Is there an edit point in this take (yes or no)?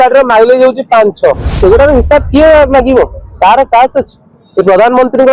yes